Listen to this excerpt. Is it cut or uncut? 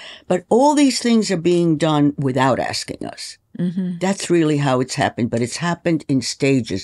uncut